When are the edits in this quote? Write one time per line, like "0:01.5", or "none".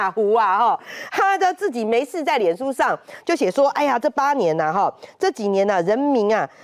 none